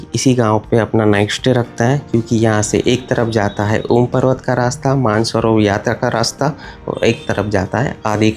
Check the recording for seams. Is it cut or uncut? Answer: uncut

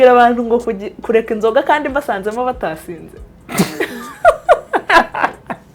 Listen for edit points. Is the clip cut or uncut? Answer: uncut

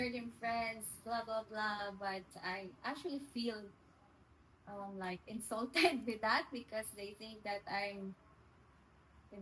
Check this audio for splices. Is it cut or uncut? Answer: uncut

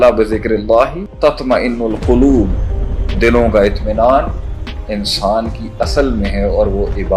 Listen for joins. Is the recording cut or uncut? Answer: cut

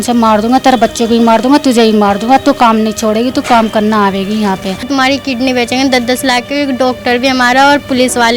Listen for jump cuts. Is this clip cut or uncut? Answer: cut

